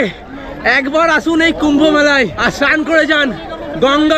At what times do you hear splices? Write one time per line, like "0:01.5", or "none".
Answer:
0:02.4